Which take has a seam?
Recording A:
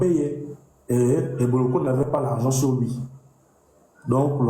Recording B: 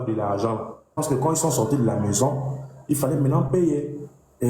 B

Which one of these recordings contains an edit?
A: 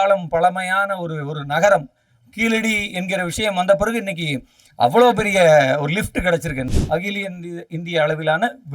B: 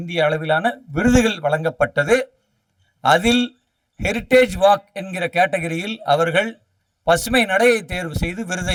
A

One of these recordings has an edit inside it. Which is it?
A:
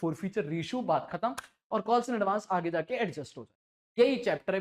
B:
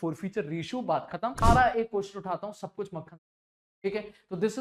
B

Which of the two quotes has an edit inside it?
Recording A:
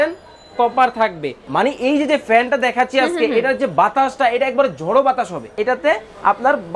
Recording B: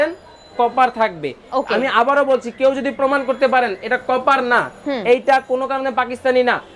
A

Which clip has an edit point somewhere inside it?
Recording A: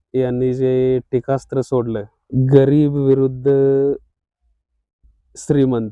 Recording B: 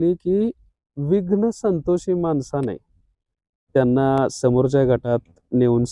A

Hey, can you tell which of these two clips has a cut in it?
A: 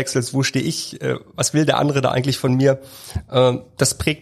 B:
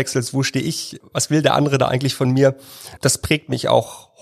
B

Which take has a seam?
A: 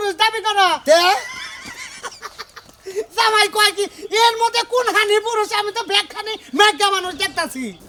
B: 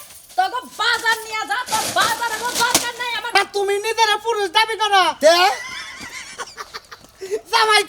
B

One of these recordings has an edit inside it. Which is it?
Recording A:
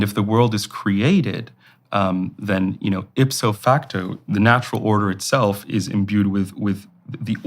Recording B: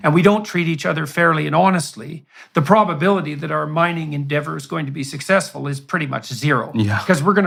A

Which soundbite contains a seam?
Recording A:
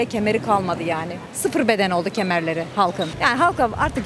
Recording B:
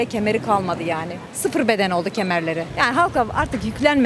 B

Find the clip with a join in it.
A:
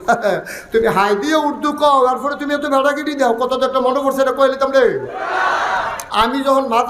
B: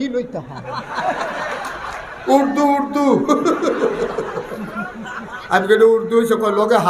A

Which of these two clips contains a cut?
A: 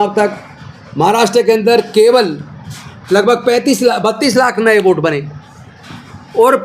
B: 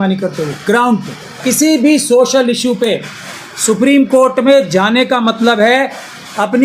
B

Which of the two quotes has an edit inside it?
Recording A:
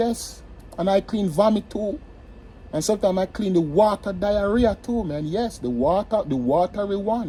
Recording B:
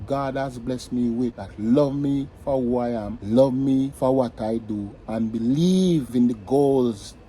B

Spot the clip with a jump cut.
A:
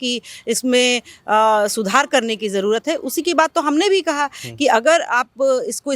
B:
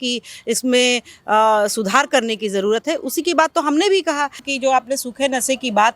B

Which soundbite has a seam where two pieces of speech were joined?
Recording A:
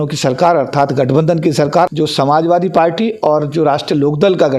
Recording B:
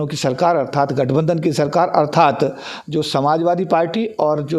A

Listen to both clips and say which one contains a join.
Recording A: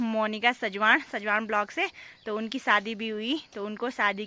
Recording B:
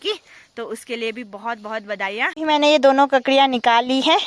B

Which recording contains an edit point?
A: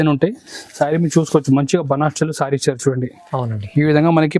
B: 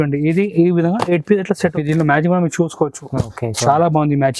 B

